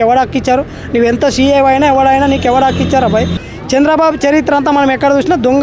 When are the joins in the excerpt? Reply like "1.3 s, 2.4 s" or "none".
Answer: 3.4 s